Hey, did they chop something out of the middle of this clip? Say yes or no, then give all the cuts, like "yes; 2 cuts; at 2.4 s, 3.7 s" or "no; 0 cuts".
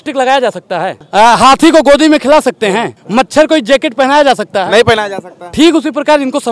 yes; 2 cuts; at 1.0 s, 3.0 s